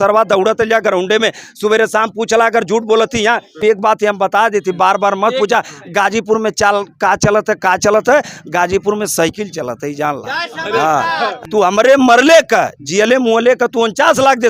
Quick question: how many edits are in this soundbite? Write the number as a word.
two